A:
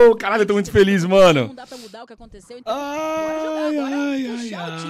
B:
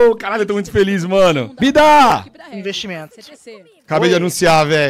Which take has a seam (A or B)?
B